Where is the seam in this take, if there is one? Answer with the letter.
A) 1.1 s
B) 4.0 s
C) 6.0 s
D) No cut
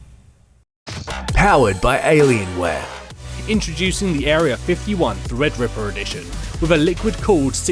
A